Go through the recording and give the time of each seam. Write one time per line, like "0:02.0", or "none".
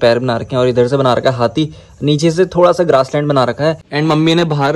0:03.9